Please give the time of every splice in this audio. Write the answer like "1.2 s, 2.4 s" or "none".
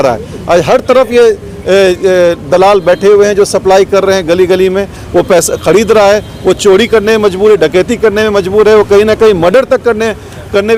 none